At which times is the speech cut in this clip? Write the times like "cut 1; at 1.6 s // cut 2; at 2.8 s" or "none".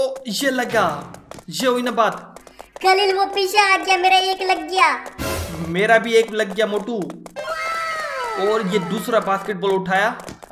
none